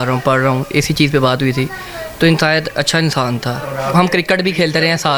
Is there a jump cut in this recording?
no; 0 cuts

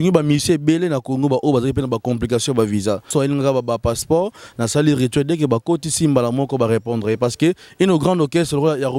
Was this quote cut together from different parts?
yes; 1 cut; at 3.1 s

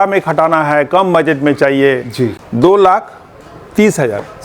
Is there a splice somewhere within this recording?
yes; 1 cut; at 2.4 s

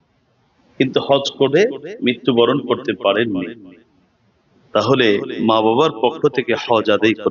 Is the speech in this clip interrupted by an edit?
no; 0 cuts

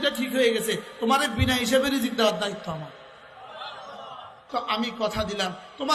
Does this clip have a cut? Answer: yes; 1 cut; at 4.4 s

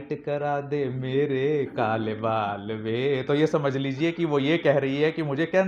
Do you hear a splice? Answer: no; 0 cuts

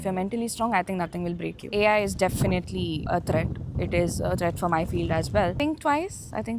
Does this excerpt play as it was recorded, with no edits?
no; 3 cuts; at 1.7 s, 3.0 s, 5.6 s

